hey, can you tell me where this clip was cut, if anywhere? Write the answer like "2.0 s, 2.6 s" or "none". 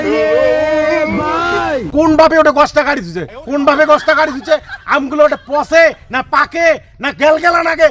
1.9 s